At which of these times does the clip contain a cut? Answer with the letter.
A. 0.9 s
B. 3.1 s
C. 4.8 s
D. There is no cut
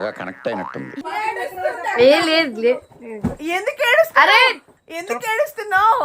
D